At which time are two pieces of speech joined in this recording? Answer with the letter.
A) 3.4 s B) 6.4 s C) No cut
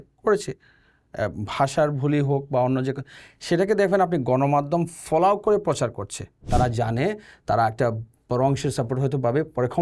B